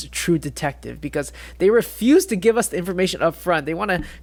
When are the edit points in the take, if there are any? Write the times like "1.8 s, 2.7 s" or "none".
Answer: none